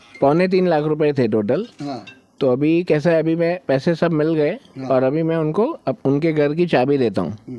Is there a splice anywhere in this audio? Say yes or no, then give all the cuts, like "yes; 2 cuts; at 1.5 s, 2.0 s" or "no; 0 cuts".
no; 0 cuts